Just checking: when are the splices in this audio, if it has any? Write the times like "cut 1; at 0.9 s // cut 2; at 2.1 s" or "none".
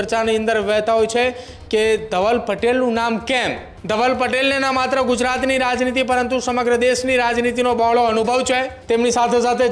cut 1; at 3.7 s // cut 2; at 8.7 s